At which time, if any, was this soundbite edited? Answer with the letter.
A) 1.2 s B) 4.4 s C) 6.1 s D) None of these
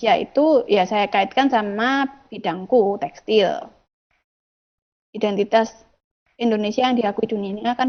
D